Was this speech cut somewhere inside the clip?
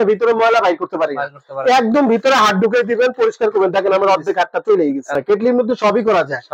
yes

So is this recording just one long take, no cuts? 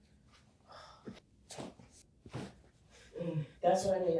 no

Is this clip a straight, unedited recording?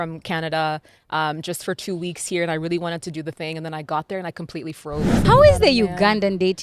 no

